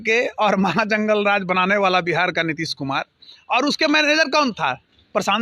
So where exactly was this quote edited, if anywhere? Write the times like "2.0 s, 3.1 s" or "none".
none